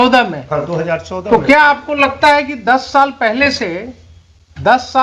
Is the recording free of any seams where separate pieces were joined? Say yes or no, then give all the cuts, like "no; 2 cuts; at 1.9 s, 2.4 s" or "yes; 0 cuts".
yes; 0 cuts